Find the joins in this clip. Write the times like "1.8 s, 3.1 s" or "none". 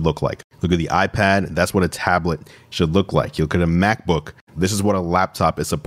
4.4 s